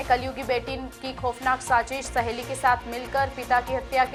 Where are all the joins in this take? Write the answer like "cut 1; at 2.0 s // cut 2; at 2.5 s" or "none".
none